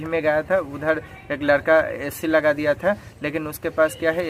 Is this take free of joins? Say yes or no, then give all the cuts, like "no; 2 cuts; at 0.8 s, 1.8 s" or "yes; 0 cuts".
yes; 0 cuts